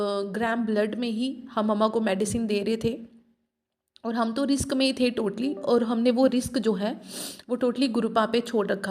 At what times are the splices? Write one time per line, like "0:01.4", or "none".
none